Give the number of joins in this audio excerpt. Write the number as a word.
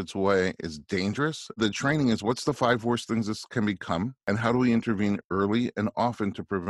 two